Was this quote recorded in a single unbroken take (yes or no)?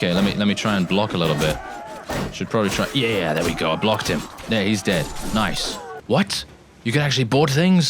no